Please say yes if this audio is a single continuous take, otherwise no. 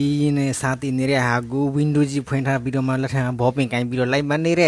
yes